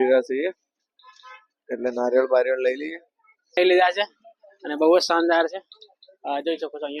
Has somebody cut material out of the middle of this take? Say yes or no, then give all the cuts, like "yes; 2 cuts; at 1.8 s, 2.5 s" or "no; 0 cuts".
yes; 1 cut; at 3.6 s